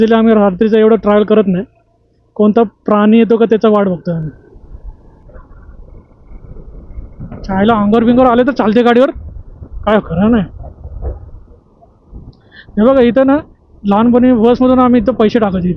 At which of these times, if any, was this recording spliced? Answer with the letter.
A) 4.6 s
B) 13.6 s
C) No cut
A